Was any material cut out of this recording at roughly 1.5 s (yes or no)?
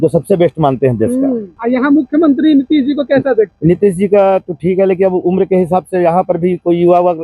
yes